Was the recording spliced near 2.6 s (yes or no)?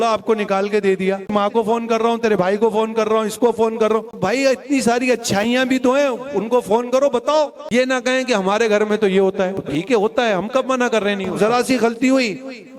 no